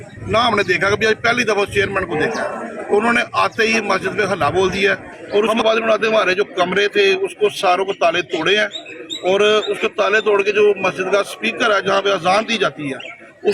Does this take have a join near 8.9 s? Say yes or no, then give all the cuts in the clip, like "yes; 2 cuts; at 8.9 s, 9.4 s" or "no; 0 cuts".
no; 1 cut; at 5.1 s